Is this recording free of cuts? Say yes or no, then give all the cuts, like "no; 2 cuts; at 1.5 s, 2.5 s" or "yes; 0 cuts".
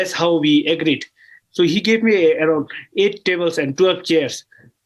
yes; 0 cuts